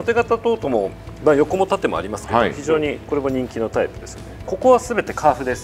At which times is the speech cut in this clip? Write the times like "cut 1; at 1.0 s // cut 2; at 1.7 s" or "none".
cut 1; at 1.0 s // cut 2; at 4.5 s